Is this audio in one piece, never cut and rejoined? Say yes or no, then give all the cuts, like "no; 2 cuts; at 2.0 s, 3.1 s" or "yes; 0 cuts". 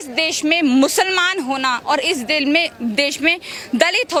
yes; 0 cuts